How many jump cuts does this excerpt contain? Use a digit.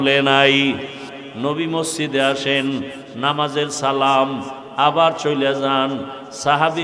1